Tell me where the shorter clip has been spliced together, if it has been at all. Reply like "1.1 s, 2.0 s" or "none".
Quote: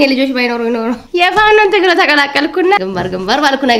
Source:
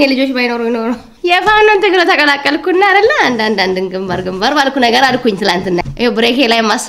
1.0 s, 2.8 s